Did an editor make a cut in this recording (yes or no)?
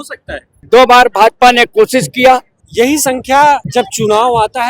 yes